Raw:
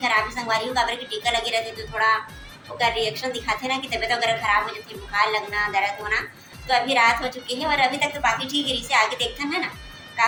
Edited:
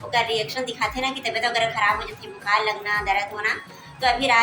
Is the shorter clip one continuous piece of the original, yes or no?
yes